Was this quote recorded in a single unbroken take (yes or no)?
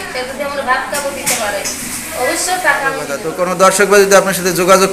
no